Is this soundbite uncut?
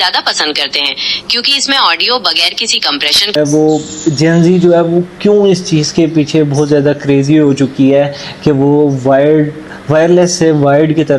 no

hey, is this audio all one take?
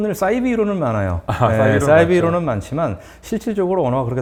yes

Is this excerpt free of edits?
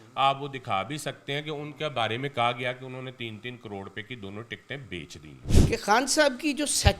no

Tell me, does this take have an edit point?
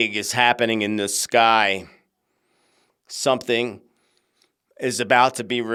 no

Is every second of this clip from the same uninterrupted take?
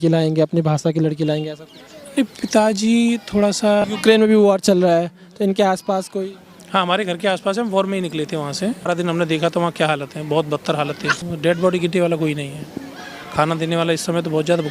no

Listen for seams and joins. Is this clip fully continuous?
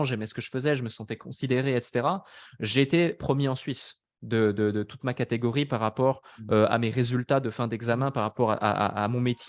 yes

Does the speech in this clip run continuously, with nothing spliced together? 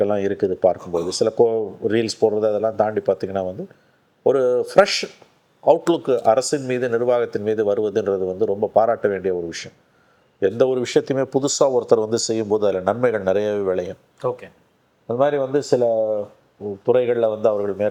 yes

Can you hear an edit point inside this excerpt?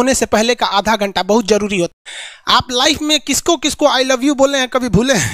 yes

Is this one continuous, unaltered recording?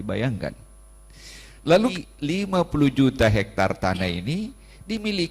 no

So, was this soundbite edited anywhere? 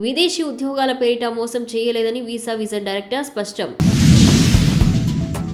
no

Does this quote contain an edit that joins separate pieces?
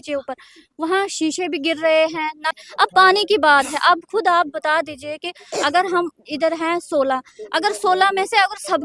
yes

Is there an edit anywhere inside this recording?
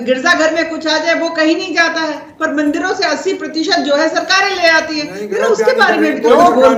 no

